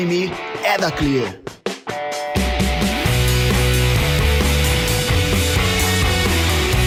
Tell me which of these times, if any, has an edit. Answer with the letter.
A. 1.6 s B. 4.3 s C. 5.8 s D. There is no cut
D